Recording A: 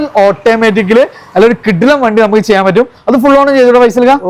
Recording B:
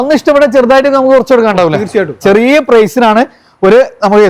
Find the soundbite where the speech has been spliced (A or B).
B